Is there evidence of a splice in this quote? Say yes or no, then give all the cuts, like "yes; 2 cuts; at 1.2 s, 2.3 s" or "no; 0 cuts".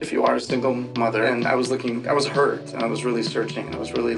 yes; 1 cut; at 1.3 s